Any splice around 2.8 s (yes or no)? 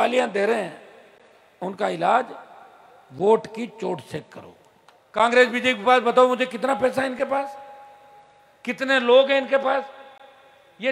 no